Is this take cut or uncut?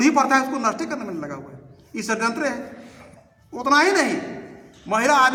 uncut